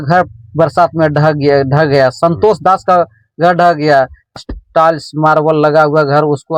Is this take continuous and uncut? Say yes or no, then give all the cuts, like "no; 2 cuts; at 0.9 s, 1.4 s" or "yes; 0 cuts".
no; 1 cut; at 4.4 s